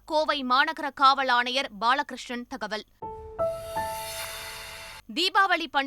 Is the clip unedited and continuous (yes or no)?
no